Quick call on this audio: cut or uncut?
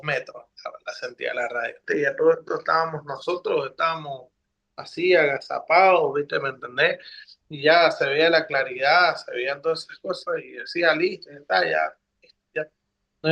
cut